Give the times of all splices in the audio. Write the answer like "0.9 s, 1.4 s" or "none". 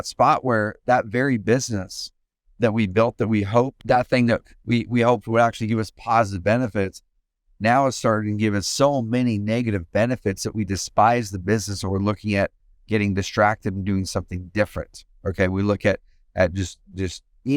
3.8 s